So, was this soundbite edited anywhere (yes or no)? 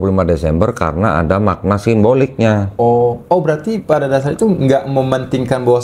yes